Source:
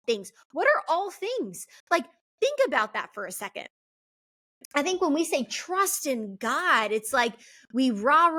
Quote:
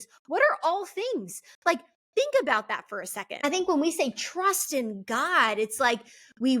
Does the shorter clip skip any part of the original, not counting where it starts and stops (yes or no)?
yes